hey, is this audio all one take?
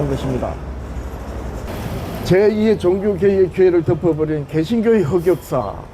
no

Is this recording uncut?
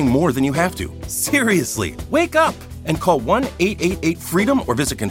yes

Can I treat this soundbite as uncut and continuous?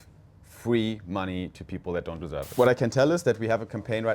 no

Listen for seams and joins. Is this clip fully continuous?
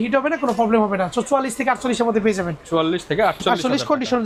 yes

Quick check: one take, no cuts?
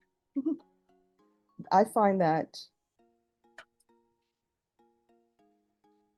yes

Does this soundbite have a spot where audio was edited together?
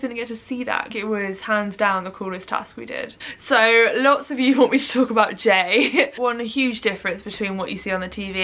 yes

